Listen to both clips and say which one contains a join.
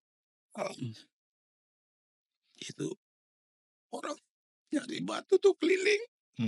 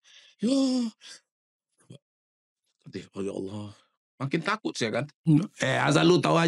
second; 1 cut; at 5.2 s

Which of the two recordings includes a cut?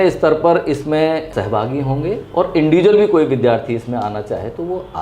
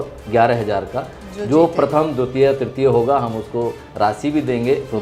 first; 1 cut; at 1.3 s

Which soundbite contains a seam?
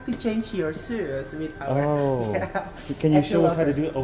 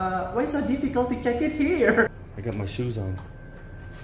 second; 1 cut; at 2.1 s

